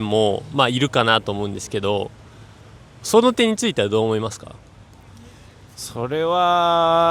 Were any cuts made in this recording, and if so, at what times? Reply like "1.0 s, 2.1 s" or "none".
none

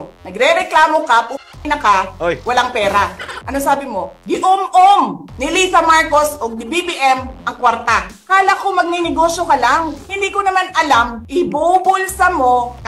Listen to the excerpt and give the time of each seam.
3.4 s, 8.1 s, 10.0 s, 11.2 s

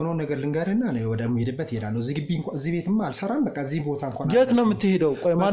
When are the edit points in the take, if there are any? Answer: none

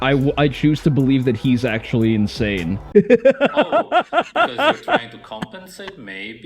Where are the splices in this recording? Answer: 2.8 s

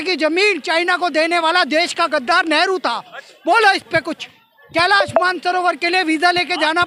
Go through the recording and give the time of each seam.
none

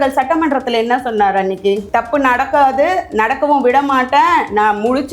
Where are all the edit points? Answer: 1.8 s

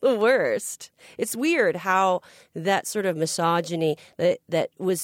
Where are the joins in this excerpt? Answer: none

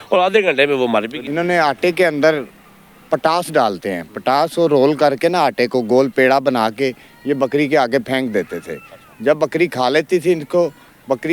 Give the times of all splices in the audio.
1.2 s

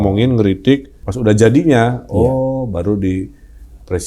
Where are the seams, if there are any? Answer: 1.0 s

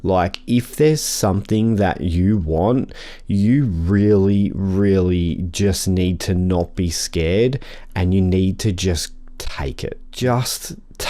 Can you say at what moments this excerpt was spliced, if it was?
10.0 s

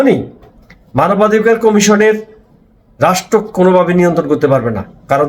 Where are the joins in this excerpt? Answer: none

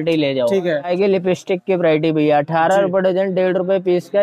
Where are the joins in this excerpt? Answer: 0.9 s

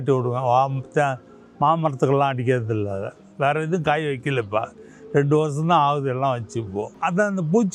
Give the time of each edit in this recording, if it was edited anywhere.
none

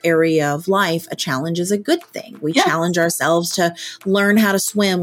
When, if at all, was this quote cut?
none

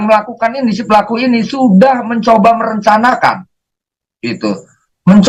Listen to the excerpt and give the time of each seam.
none

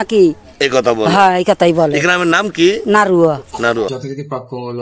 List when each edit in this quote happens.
3.9 s

